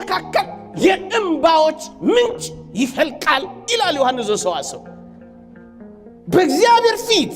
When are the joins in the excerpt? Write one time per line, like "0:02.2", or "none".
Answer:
none